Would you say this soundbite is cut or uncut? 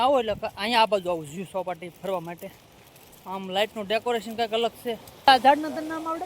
cut